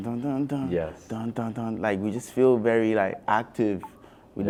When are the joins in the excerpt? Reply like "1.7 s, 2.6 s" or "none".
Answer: none